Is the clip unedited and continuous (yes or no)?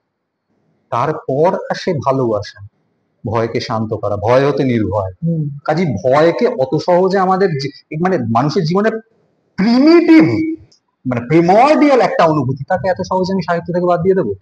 yes